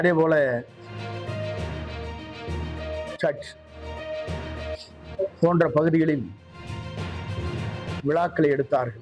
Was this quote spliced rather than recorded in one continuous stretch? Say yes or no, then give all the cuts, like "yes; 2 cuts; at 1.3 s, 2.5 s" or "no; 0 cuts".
yes; 2 cuts; at 6.5 s, 8.0 s